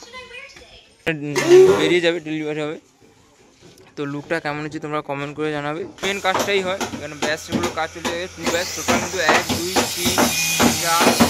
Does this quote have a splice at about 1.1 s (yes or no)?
yes